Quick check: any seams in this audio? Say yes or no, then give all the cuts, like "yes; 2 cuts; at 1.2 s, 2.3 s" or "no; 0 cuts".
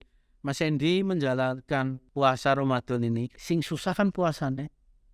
yes; 2 cuts; at 2.0 s, 3.4 s